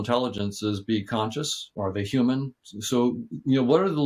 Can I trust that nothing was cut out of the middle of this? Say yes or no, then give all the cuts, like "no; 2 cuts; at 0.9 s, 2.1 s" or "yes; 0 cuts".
no; 1 cut; at 1.7 s